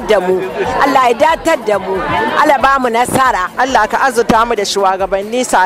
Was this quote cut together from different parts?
yes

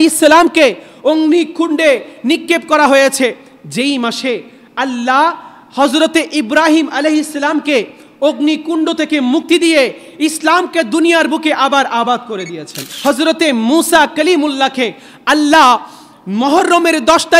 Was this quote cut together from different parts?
yes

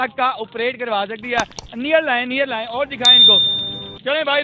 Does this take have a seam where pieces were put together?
no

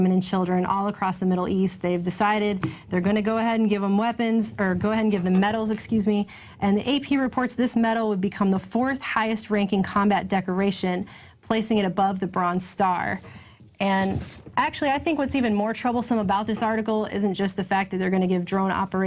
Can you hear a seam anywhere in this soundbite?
no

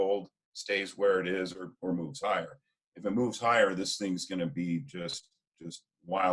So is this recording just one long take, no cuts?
yes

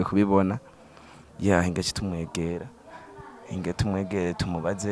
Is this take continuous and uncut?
yes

